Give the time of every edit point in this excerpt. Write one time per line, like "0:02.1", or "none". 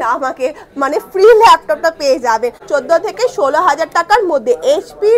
0:02.6